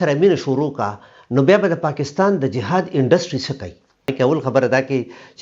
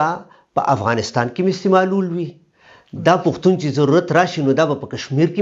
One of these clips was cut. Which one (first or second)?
first